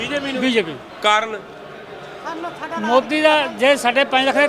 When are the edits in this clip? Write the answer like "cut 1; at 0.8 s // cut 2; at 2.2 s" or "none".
none